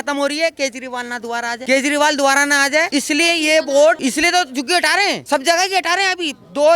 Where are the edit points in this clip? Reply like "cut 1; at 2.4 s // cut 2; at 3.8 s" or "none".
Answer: cut 1; at 1.6 s // cut 2; at 2.9 s // cut 3; at 4.0 s // cut 4; at 5.2 s